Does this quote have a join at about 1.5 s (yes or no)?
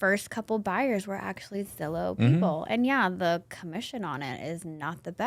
no